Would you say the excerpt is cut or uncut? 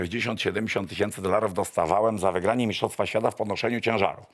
uncut